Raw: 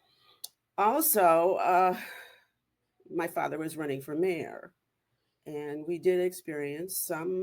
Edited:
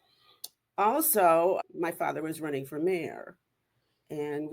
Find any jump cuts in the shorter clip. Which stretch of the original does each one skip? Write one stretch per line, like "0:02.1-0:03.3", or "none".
0:01.6-0:03.0